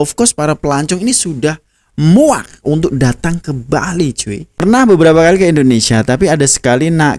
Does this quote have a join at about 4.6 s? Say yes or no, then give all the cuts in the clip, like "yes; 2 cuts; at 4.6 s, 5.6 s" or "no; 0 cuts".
yes; 1 cut; at 4.6 s